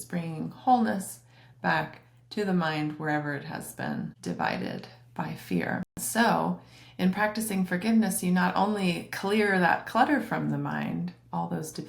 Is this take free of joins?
no; 1 cut; at 6.0 s

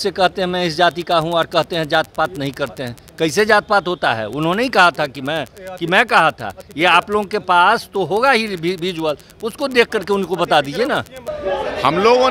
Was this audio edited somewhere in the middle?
no; 0 cuts

